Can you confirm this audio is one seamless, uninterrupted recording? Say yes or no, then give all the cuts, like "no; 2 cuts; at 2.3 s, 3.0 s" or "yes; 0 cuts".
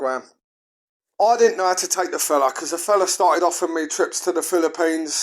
no; 1 cut; at 1.2 s